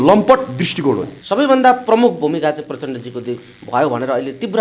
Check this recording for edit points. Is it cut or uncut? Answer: cut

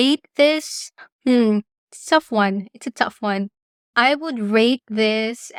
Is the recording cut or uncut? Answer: uncut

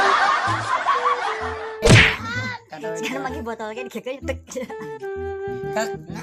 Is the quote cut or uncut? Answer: cut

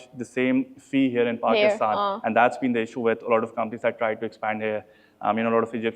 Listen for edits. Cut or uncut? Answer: uncut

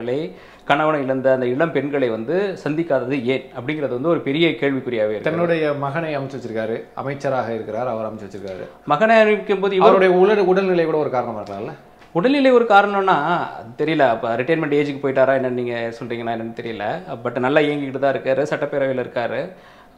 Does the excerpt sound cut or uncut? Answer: uncut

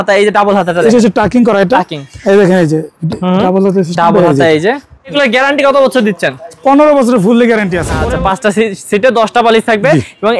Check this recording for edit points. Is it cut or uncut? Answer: cut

